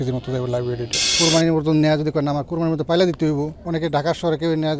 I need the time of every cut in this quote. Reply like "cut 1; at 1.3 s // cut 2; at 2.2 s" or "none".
cut 1; at 1.2 s // cut 2; at 3.6 s